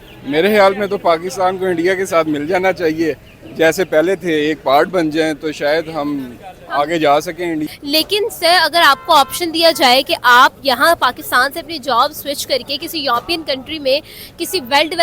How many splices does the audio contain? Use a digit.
1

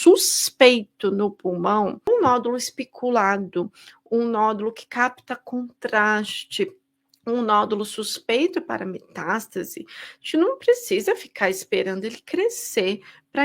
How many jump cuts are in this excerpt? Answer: 1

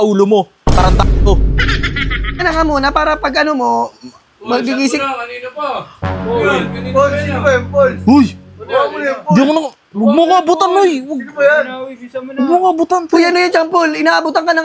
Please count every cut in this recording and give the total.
0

